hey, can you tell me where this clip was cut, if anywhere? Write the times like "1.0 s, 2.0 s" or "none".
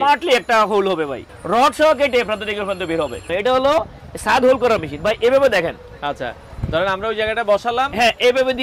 1.3 s, 3.3 s